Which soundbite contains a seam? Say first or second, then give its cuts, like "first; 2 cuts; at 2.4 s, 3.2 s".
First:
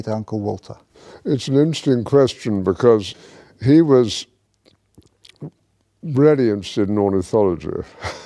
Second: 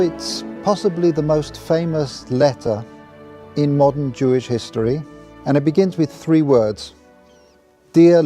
second; 1 cut; at 6.2 s